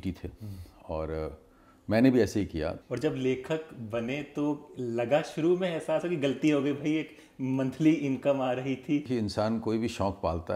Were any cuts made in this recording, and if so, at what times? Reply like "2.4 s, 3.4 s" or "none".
2.8 s, 9.1 s